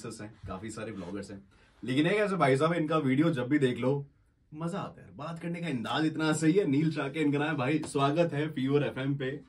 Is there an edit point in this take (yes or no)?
no